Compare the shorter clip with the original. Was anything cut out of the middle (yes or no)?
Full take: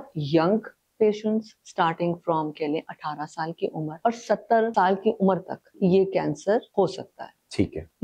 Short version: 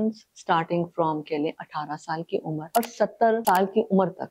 no